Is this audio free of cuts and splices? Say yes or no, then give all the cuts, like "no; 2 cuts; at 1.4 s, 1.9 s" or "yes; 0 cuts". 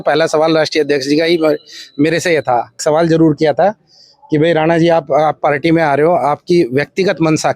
no; 1 cut; at 2.8 s